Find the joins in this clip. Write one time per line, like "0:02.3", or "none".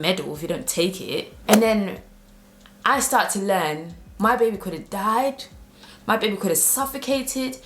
0:01.3